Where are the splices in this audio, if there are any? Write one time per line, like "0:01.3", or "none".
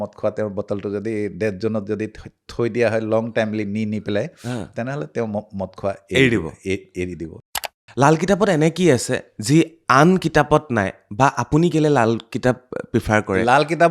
0:07.4